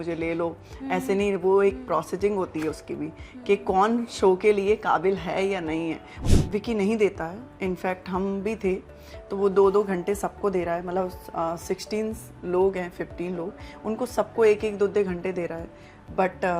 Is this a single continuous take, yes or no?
no